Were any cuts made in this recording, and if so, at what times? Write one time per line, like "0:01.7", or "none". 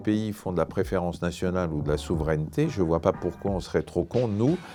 none